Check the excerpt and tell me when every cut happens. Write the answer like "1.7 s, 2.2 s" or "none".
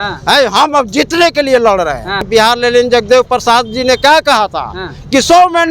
2.3 s